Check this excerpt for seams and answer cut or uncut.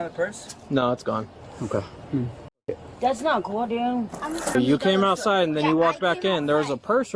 cut